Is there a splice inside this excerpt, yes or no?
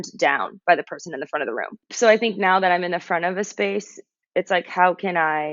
yes